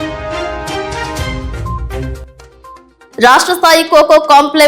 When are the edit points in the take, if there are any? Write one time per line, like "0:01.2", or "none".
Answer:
0:01.7
0:02.9